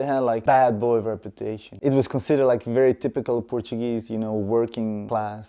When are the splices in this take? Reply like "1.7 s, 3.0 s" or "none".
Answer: 1.7 s